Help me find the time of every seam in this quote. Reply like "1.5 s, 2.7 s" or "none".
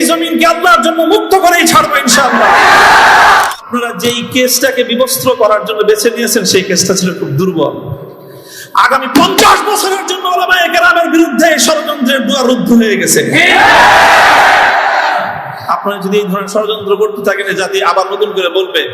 3.5 s